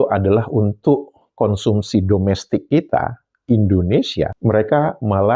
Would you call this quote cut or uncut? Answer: cut